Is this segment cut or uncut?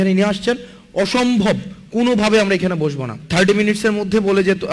cut